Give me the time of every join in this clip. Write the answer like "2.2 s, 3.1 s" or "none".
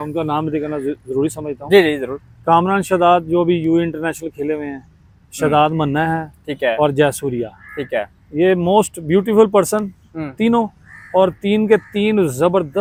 none

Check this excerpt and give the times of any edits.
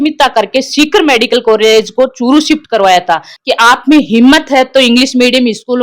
3.3 s

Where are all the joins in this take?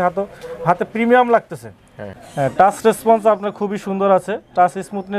1.7 s

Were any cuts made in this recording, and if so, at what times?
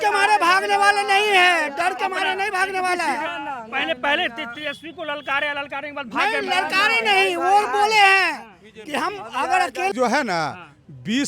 9.9 s

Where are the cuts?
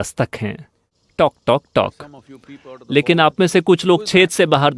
1.0 s

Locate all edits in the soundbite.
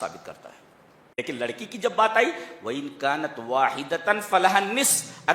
1.1 s

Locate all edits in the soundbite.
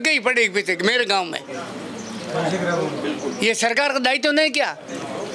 none

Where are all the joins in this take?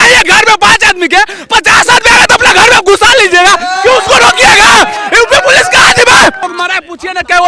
6.4 s

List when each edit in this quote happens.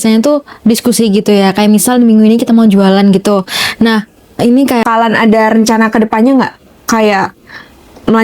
4.8 s

